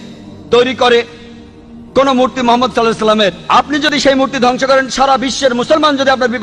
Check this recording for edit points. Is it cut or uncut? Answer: uncut